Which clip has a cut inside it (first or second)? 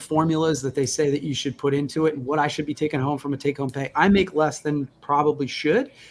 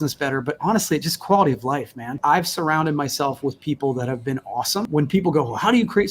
second